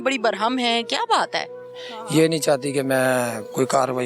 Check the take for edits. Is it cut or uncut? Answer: cut